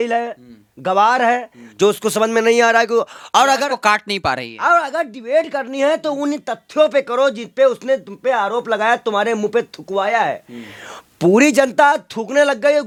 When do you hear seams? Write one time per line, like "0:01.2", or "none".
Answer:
none